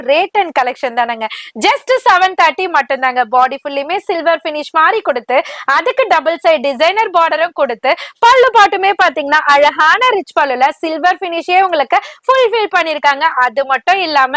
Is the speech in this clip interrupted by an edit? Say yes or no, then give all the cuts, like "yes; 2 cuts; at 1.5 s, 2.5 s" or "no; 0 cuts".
no; 0 cuts